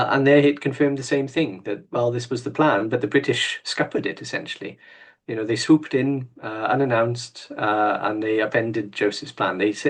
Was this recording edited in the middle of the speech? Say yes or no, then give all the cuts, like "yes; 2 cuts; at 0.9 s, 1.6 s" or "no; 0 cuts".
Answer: no; 0 cuts